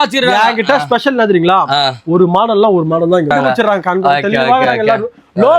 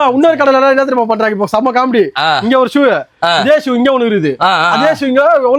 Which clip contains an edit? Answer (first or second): first